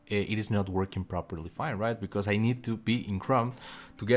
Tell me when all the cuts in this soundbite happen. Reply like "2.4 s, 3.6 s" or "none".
none

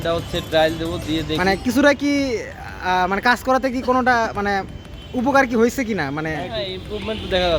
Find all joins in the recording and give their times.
none

